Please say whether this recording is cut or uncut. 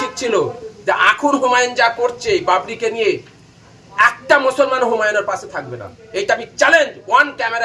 uncut